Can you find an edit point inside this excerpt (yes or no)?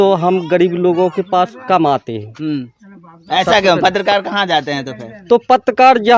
no